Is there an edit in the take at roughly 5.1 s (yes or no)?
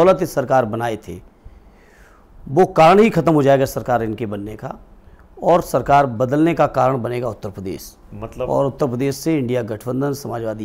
no